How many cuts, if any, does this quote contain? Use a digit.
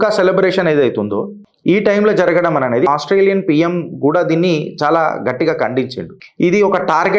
1